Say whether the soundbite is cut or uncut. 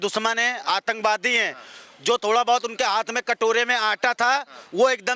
uncut